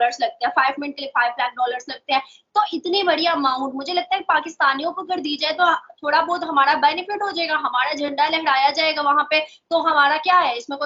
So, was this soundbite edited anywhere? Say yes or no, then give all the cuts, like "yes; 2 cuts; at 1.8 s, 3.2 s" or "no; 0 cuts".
no; 0 cuts